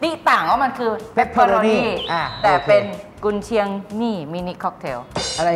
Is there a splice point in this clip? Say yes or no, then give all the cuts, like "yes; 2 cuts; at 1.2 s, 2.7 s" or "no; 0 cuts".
no; 0 cuts